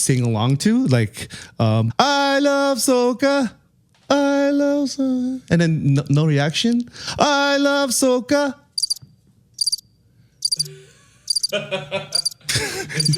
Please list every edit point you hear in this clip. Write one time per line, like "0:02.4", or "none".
0:01.9